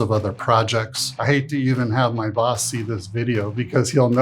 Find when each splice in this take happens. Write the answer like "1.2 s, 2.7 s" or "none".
1.0 s

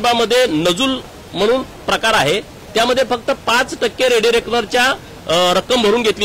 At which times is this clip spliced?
none

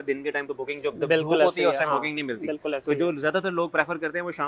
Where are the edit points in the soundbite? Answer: none

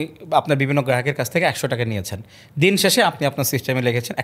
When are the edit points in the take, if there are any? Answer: none

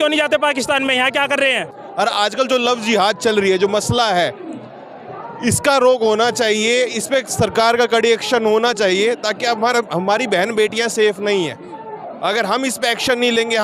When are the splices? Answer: 1.7 s

